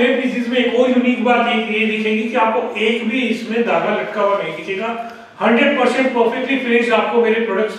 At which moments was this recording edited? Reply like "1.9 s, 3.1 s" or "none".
none

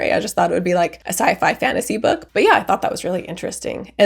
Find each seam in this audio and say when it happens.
2.2 s

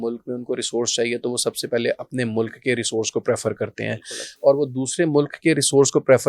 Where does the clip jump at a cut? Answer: none

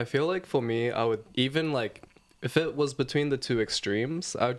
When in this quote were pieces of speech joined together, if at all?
1.3 s

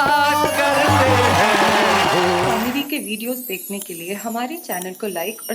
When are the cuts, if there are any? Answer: 2.5 s

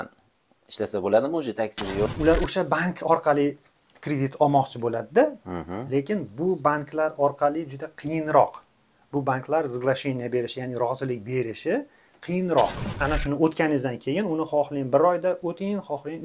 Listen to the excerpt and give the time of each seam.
2.1 s, 12.9 s

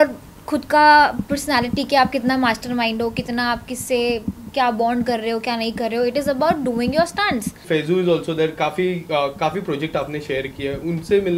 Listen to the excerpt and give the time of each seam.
7.6 s

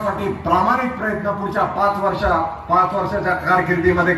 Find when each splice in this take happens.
none

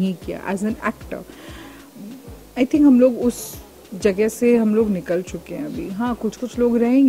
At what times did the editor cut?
none

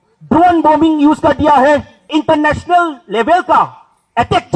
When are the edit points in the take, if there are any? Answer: 2.1 s

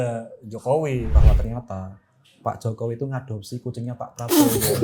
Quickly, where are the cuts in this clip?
1.1 s

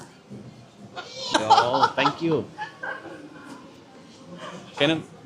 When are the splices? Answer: 1.3 s

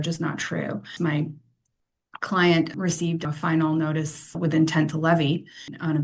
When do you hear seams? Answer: 0.9 s

